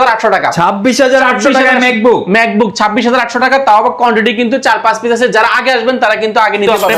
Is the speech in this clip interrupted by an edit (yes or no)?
no